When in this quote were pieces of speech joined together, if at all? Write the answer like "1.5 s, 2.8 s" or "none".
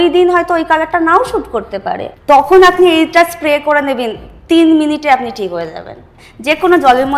2.1 s, 6.2 s